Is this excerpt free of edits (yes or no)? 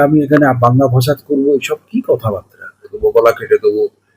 no